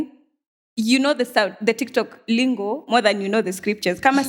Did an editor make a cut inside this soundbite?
no; 0 cuts

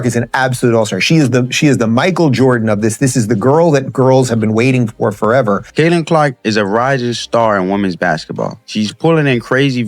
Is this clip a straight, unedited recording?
no; 2 cuts; at 5.7 s, 8.6 s

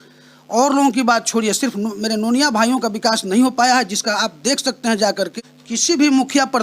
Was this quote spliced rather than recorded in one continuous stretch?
yes; 1 cut; at 5.5 s

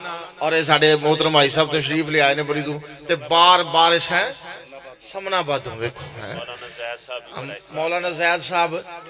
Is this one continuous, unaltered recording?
yes; 0 cuts

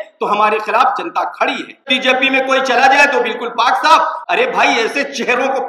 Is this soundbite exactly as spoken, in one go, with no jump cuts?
no; 2 cuts; at 1.9 s, 4.2 s

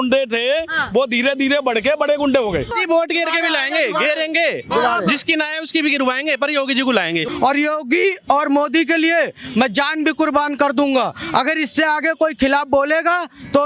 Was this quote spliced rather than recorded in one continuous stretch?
yes; 2 cuts; at 2.7 s, 7.2 s

